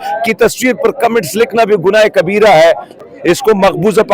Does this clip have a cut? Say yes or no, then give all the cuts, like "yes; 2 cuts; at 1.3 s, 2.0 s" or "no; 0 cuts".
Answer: yes; 1 cut; at 2.9 s